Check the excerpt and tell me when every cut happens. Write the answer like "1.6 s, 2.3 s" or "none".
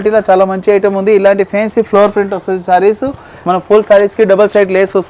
3.3 s